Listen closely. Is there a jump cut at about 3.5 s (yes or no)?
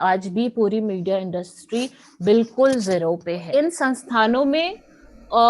yes